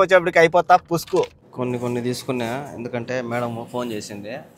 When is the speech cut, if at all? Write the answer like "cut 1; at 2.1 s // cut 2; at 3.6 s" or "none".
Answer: cut 1; at 1.4 s